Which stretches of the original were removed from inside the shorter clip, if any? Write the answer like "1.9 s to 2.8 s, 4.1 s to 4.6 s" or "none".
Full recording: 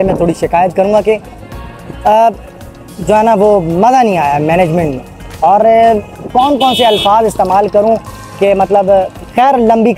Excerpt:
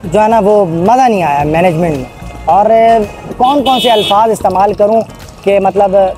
none